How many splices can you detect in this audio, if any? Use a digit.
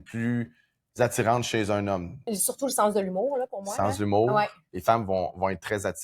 2